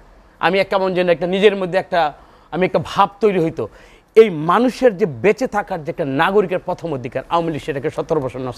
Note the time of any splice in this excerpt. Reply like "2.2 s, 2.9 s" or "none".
none